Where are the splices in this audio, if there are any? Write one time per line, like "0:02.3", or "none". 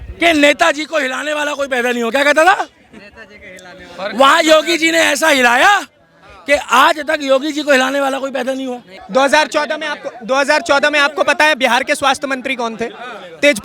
none